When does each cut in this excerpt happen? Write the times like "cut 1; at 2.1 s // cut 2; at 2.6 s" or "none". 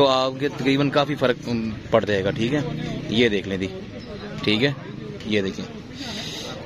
none